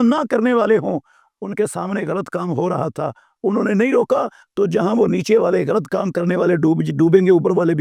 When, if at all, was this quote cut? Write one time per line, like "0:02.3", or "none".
none

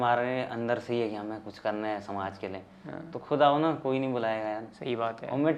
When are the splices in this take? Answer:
none

